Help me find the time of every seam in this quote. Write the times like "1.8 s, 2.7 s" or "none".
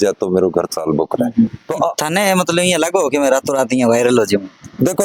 1.6 s